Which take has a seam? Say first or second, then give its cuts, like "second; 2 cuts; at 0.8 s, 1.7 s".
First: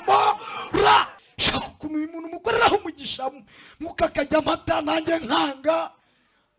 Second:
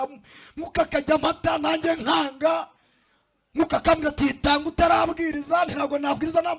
first; 1 cut; at 1.2 s